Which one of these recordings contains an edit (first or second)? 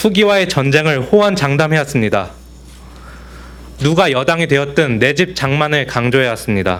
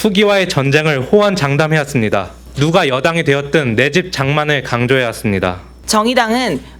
second